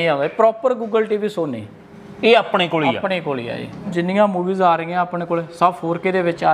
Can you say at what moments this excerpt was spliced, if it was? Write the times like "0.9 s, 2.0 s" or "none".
3.9 s